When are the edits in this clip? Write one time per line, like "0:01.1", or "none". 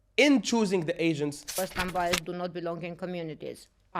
0:01.5

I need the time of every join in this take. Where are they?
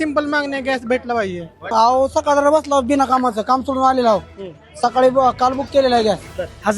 0:01.7

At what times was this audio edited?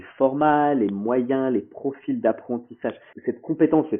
0:03.1

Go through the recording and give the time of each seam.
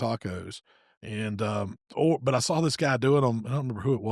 none

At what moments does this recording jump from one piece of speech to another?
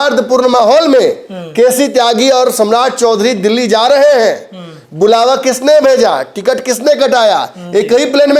none

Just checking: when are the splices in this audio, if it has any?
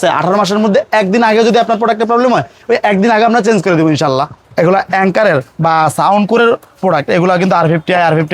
0:04.4

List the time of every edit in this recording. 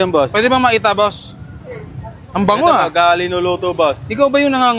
none

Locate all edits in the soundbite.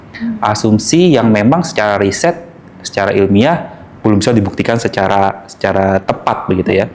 none

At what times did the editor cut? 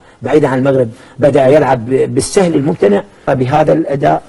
0:03.3

